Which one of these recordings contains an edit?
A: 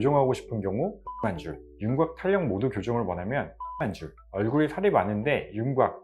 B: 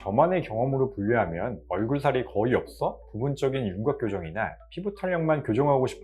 A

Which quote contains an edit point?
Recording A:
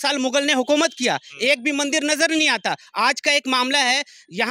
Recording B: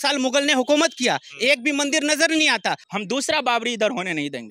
B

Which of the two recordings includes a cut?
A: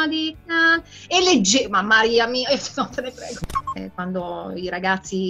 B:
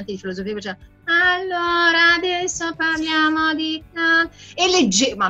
A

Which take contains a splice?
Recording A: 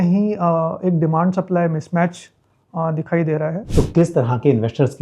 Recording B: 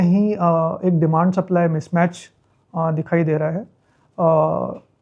A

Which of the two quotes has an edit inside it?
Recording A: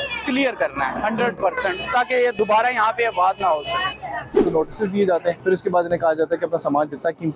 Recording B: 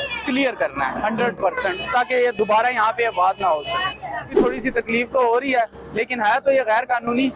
A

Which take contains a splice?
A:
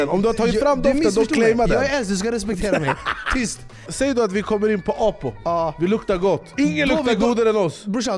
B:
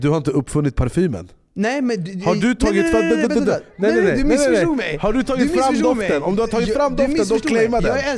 A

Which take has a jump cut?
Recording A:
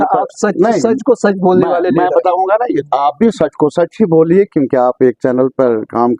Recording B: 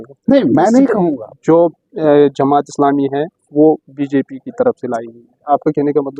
B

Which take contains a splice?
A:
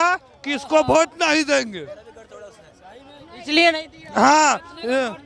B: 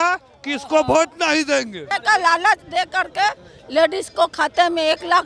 B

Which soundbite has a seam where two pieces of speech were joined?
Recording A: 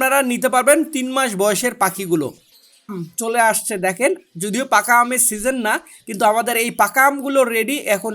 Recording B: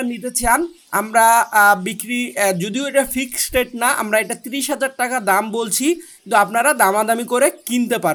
A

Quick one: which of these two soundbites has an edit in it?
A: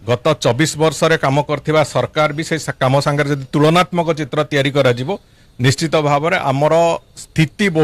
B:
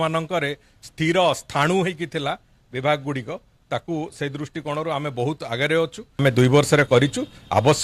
B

